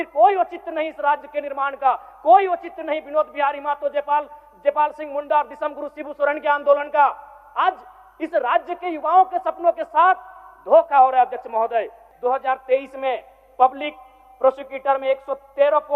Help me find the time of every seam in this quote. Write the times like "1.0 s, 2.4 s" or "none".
none